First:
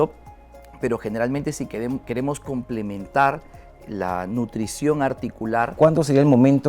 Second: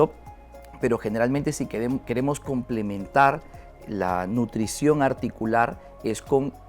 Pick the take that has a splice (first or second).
first